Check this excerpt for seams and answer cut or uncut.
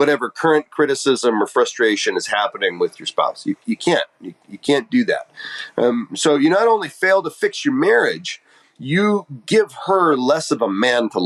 uncut